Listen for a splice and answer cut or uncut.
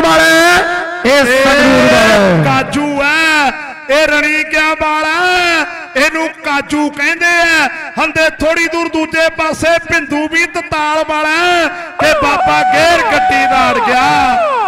uncut